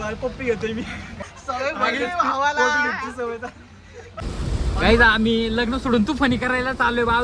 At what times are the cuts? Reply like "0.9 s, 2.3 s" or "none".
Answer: 1.2 s, 4.2 s